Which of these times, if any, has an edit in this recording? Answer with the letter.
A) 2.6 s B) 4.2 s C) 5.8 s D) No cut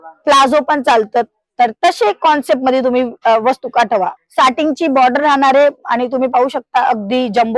B